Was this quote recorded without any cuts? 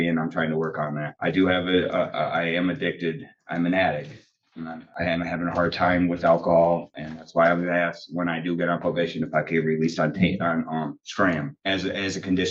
yes; 0 cuts

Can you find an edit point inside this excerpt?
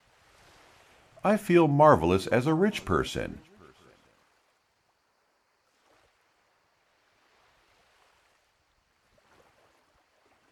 yes; 2 cuts; at 1.1 s, 4.3 s

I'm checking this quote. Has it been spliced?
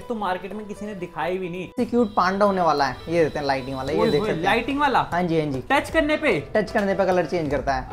yes; 1 cut; at 1.8 s

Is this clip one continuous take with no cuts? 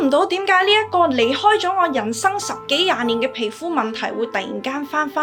yes; 0 cuts

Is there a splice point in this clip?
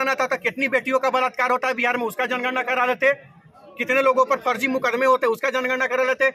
no; 0 cuts

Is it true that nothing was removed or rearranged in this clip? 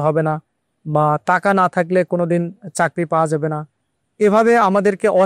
yes; 0 cuts

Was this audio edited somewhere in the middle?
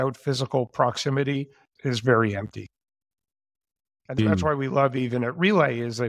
yes; 1 cut; at 4.9 s

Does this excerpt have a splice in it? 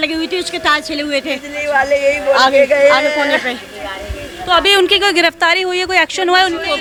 no; 0 cuts

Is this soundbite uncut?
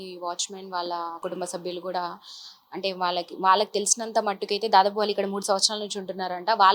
no; 1 cut; at 1.2 s

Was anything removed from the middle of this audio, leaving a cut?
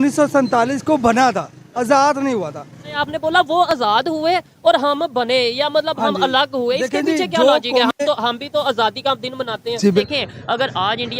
yes; 2 cuts; at 3.0 s, 10.0 s

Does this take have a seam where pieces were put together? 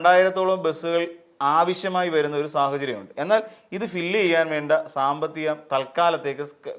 no; 0 cuts

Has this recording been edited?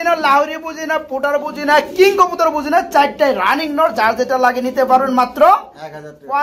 no; 0 cuts

